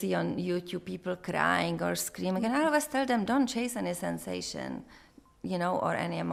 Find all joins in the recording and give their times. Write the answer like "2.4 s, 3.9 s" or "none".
none